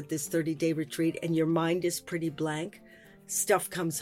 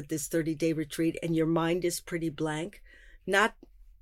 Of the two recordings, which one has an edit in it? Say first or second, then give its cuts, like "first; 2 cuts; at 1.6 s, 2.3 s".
first; 1 cut; at 3.1 s